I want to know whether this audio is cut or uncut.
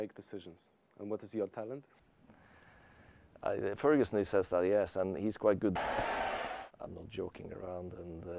cut